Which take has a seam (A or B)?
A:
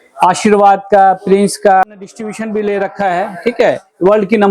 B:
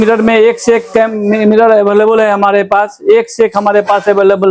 A